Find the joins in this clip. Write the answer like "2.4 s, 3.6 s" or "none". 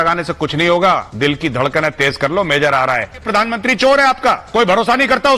1.1 s, 3.3 s, 4.4 s